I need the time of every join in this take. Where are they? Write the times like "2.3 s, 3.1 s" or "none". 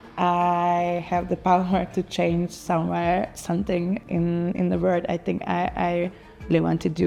none